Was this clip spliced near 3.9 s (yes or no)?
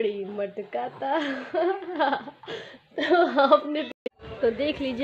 yes